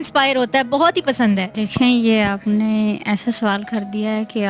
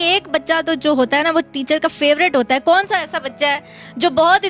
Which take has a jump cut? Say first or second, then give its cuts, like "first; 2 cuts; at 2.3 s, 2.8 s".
first; 1 cut; at 1.6 s